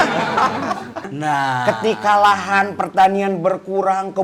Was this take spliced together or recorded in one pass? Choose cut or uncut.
cut